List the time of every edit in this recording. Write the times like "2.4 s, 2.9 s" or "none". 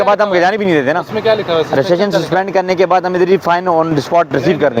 none